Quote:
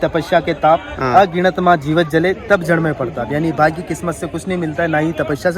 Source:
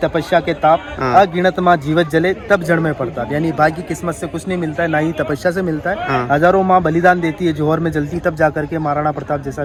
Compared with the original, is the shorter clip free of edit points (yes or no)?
yes